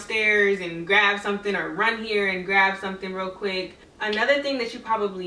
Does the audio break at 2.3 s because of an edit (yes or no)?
no